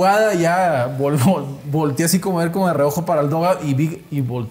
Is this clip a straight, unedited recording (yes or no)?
yes